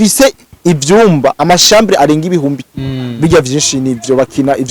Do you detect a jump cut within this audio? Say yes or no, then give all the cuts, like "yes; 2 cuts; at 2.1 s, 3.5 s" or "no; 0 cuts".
yes; 1 cut; at 2.7 s